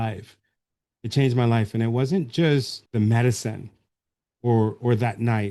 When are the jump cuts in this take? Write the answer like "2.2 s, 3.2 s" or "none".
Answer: 2.8 s